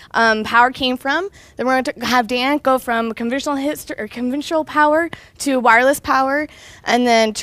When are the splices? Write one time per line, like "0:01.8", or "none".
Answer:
0:01.5